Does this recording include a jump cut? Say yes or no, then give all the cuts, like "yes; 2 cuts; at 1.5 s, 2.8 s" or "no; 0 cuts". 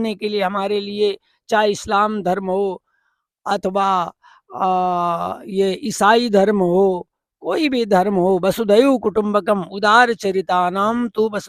no; 0 cuts